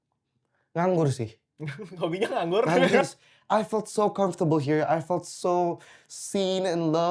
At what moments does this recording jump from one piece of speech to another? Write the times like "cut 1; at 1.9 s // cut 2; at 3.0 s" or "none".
cut 1; at 3.1 s